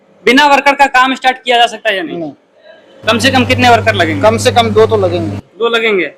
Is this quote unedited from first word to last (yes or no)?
yes